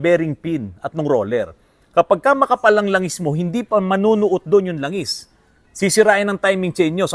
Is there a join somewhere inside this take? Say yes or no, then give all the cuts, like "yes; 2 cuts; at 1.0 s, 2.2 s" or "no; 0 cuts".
no; 0 cuts